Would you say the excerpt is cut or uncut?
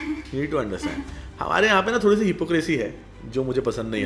uncut